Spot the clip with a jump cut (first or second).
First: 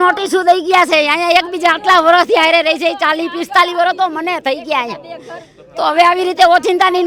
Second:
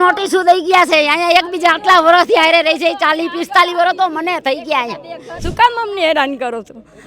second